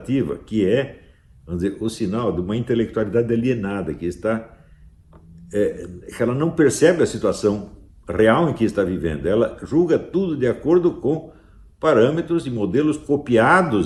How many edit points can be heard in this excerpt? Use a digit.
0